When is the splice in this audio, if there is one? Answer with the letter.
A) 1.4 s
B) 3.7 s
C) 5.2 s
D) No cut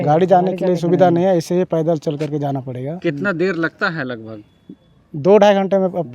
D